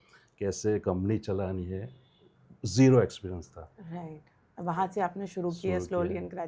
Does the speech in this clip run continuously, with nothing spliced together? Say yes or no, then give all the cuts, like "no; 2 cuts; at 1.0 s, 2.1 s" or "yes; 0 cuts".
yes; 0 cuts